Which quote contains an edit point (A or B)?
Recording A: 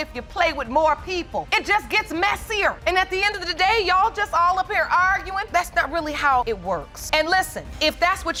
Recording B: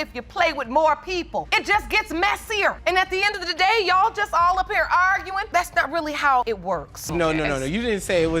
B